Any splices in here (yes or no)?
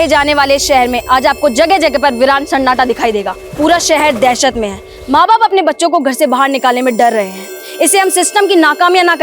yes